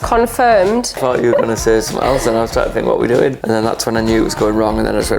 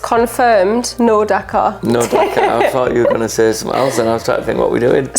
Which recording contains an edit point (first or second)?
first